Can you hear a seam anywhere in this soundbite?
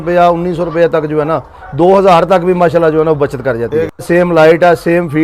yes; 1 cut; at 4.0 s

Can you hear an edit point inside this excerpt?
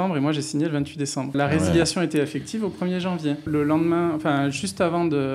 yes; 2 cuts; at 1.3 s, 3.4 s

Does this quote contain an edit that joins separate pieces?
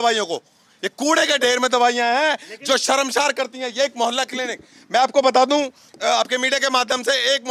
no; 0 cuts

